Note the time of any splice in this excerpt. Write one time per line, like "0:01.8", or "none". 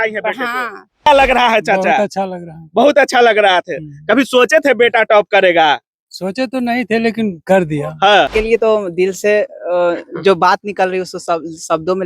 0:01.1
0:08.3